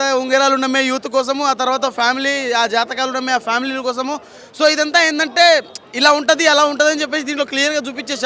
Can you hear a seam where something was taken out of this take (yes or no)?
no